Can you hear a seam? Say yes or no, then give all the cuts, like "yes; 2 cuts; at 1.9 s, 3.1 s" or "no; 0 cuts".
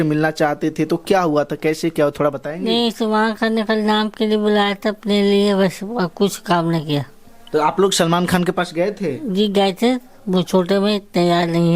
no; 0 cuts